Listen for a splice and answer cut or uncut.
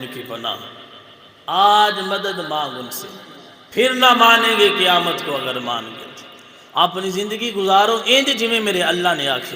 uncut